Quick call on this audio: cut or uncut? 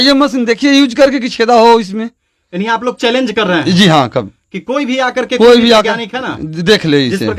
uncut